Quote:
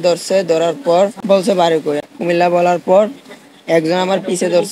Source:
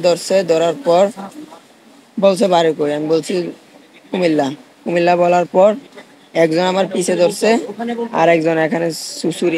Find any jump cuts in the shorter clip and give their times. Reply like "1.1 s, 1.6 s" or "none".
1.2 s, 2.0 s